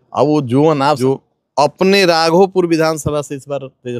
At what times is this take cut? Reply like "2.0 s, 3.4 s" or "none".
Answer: 1.0 s